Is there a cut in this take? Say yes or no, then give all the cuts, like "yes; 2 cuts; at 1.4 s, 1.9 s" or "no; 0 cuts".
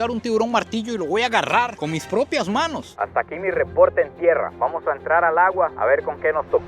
yes; 1 cut; at 2.8 s